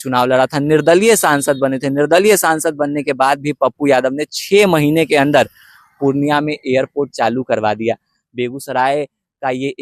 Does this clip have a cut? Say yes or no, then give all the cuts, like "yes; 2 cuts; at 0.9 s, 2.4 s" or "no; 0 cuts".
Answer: no; 0 cuts